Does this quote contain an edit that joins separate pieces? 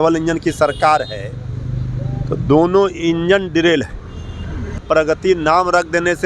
yes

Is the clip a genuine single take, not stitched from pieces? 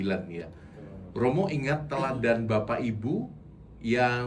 yes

